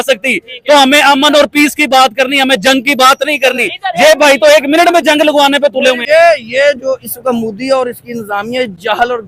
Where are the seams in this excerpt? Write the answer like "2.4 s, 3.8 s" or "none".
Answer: 6.0 s